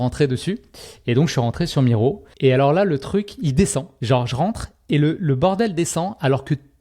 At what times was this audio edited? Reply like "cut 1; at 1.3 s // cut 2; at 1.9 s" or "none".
cut 1; at 2.3 s // cut 2; at 3.9 s

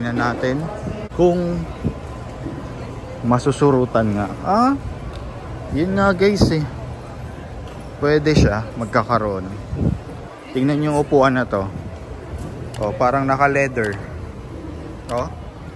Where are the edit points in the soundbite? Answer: cut 1; at 1.0 s

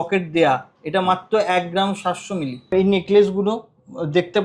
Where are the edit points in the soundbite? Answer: cut 1; at 2.7 s

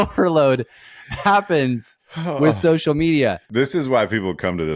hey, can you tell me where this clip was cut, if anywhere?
cut 1; at 3.6 s

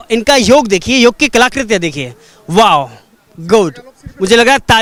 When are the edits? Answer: none

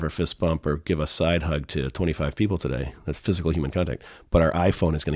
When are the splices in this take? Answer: none

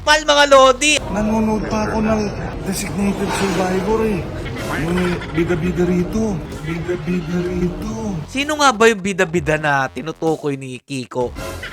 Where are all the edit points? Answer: cut 1; at 0.9 s // cut 2; at 2.5 s // cut 3; at 4.4 s // cut 4; at 8.3 s

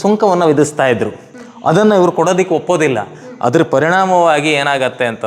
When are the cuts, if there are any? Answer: none

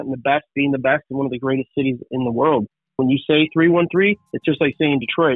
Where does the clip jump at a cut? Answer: cut 1; at 3.0 s // cut 2; at 4.3 s

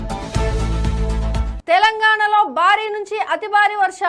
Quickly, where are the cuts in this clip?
none

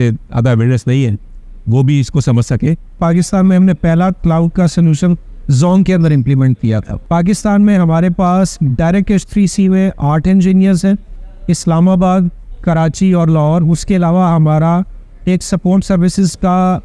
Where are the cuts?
cut 1; at 3.0 s // cut 2; at 7.0 s

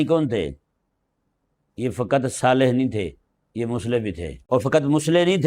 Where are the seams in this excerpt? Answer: cut 1; at 4.3 s

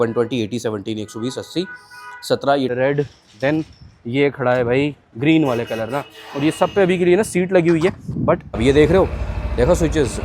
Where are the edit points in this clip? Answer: cut 1; at 2.7 s // cut 2; at 8.6 s

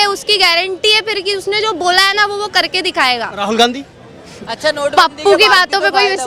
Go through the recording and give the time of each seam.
none

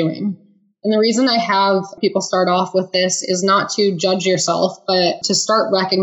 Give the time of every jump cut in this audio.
cut 1; at 2.0 s // cut 2; at 5.2 s

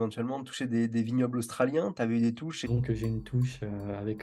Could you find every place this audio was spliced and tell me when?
cut 1; at 2.7 s

